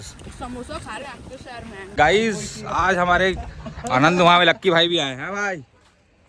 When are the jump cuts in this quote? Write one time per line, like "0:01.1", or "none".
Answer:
0:01.9